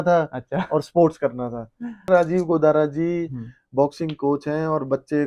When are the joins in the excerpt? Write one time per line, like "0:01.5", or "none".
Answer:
0:02.0